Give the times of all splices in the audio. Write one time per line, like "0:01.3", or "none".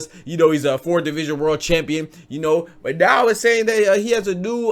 none

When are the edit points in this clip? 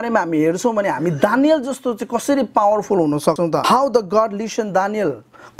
0:03.4

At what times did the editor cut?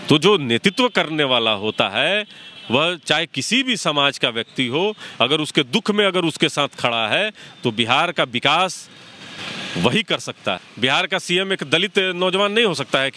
0:10.6

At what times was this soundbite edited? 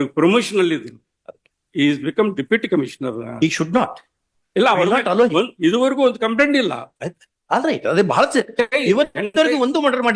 none

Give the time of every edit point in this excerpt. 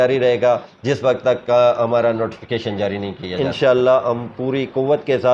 0:03.3

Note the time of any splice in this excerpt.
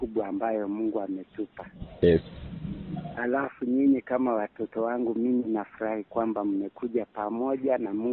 none

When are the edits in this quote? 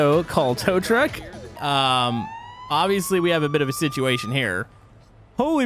0:01.6

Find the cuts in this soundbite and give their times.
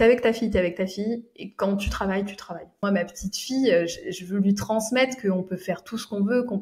0:02.8

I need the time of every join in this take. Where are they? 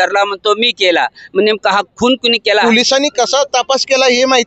0:02.6

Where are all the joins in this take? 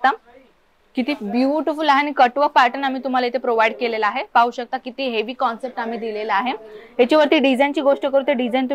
none

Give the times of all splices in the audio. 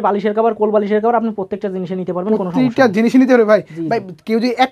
none

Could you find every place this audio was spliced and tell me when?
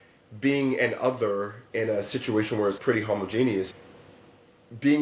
none

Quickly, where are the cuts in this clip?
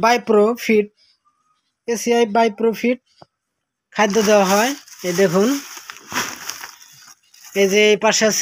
none

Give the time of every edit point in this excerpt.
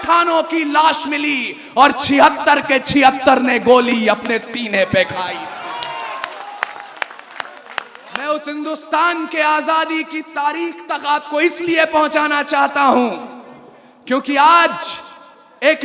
0:08.2

